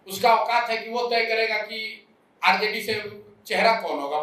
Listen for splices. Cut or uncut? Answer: uncut